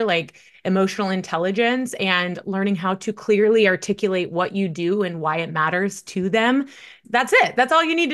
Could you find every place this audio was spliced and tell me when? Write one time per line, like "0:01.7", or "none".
0:06.9